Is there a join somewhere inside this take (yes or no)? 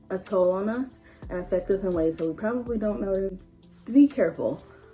yes